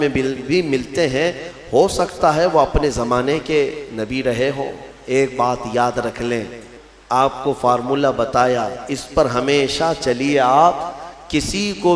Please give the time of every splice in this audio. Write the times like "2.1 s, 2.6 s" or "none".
6.7 s